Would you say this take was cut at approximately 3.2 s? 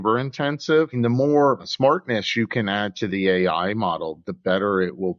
no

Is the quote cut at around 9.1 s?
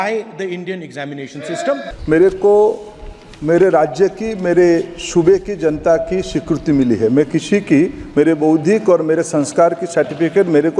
no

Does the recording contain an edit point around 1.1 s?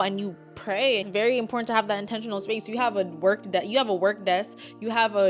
yes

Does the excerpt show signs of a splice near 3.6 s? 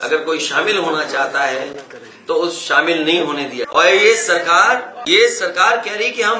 yes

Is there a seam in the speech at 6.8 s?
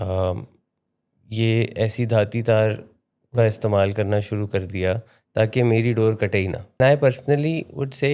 yes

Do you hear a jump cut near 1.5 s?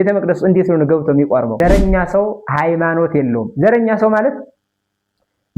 yes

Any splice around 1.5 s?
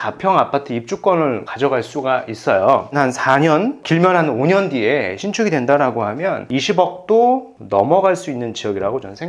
yes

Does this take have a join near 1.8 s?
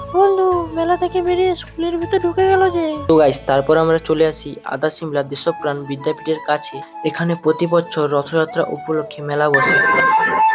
no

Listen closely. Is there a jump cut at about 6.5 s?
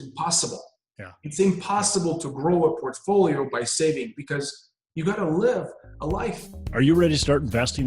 yes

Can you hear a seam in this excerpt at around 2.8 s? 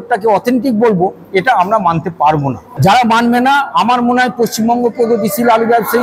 yes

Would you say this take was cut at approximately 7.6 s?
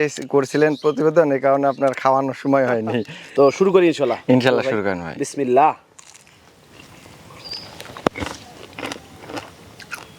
no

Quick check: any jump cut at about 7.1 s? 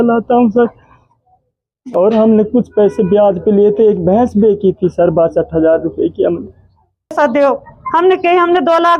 yes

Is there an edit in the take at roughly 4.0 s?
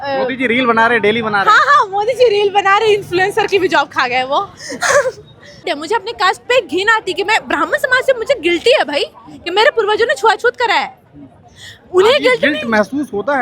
no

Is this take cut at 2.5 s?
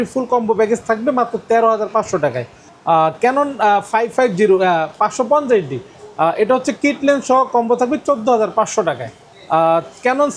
no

